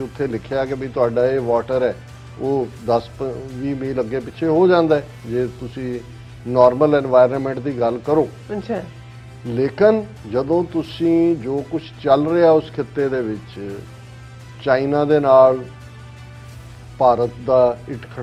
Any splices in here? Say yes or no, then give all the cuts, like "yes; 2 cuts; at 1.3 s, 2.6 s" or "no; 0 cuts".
no; 0 cuts